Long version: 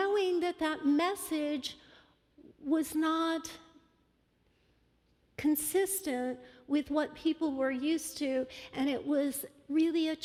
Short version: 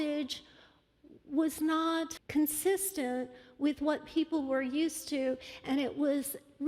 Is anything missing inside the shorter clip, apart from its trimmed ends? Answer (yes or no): yes